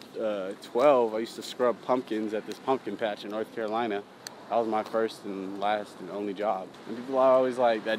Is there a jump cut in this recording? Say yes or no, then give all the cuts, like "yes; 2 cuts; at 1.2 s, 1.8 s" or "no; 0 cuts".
yes; 1 cut; at 6.7 s